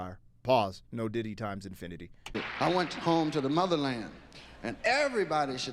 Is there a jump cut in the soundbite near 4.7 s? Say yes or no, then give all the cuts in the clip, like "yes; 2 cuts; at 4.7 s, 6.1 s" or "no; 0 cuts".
no; 1 cut; at 2.4 s